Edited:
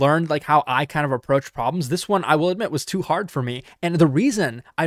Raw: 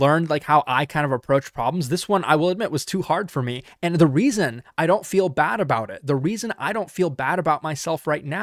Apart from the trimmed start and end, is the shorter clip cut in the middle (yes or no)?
no